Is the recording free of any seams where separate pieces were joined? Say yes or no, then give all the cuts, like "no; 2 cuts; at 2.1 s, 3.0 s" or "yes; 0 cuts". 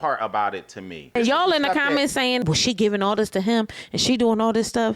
no; 1 cut; at 1.2 s